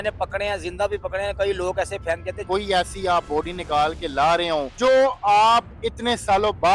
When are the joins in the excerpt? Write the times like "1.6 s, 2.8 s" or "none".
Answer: 2.4 s, 4.7 s